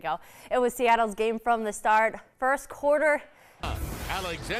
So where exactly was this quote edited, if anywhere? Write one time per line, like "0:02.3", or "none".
0:03.6